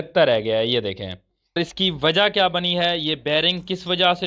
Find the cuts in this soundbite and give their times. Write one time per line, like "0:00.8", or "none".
0:01.6